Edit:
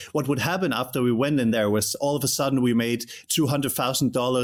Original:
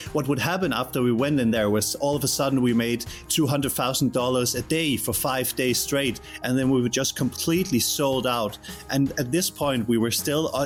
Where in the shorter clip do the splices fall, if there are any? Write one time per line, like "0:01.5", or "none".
none